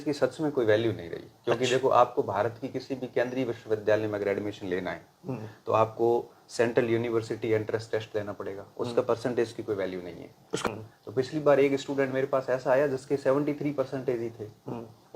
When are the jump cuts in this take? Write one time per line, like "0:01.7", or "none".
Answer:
0:10.7